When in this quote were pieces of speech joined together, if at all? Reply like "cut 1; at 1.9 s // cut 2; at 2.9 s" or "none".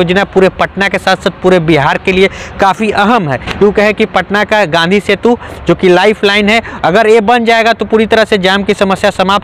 none